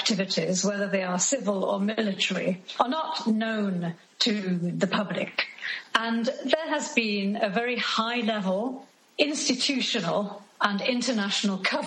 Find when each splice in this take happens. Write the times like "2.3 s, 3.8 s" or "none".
5.7 s